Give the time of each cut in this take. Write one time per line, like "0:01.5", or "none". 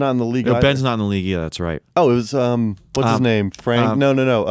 0:01.8
0:02.8